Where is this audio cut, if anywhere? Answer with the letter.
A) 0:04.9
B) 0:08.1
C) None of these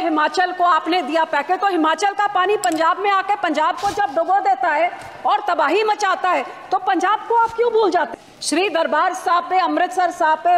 B